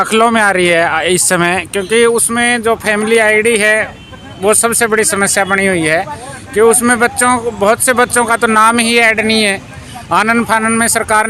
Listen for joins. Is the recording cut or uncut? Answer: uncut